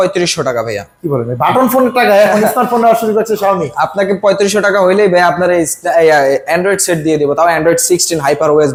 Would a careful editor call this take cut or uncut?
uncut